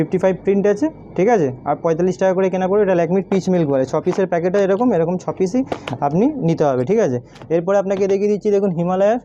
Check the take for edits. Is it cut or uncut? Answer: uncut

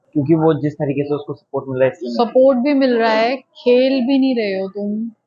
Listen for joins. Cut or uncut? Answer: uncut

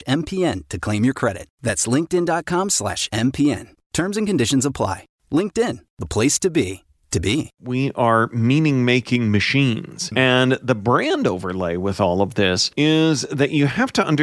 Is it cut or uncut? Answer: cut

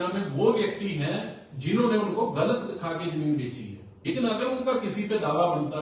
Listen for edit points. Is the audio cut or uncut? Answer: cut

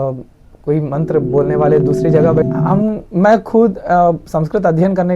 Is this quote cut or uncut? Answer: cut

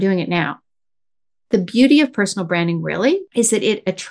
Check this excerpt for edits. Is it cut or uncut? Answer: cut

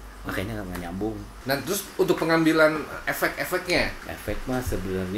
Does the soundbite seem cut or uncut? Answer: cut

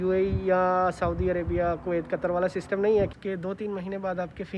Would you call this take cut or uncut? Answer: cut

